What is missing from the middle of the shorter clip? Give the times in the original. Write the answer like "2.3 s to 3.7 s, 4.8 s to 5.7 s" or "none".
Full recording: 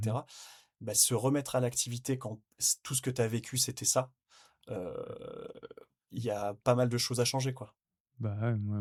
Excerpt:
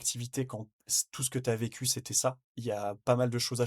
4.2 s to 6.1 s